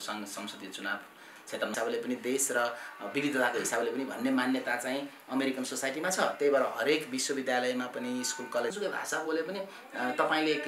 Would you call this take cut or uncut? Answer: cut